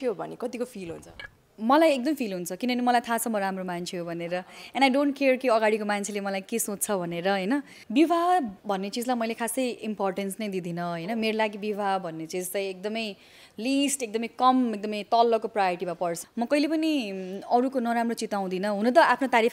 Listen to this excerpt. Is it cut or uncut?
cut